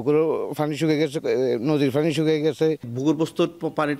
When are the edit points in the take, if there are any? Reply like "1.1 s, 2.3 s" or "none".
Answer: 2.9 s